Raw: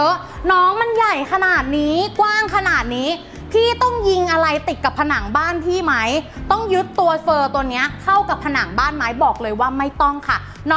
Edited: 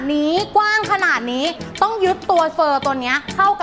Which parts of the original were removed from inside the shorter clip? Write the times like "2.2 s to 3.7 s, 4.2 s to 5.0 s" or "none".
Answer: 3.3 s to 6.3 s